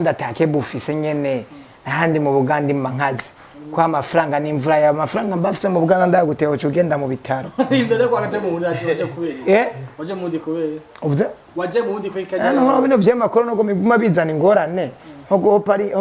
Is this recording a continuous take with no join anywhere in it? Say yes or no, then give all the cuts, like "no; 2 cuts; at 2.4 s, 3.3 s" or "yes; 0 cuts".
yes; 0 cuts